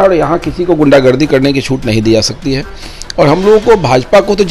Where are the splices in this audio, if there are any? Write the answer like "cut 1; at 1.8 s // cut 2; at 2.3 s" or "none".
none